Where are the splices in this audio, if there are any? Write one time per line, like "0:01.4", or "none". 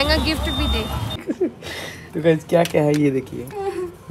0:01.2